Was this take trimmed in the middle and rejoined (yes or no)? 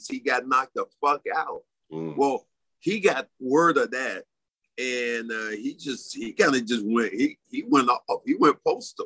no